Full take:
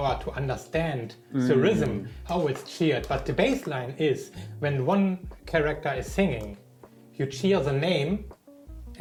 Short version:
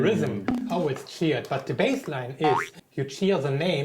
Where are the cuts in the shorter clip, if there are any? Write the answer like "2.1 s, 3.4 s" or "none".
2.8 s